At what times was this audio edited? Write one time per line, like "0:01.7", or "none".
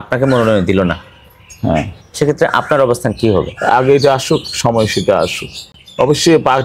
none